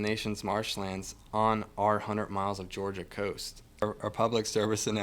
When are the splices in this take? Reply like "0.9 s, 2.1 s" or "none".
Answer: 3.8 s